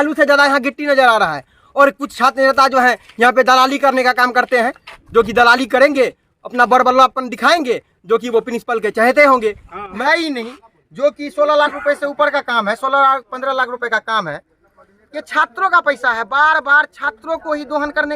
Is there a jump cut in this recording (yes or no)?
yes